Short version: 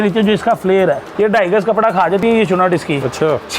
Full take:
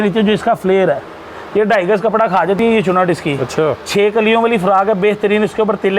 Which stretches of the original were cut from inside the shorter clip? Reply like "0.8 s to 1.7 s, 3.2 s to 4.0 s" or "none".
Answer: 1.1 s to 1.4 s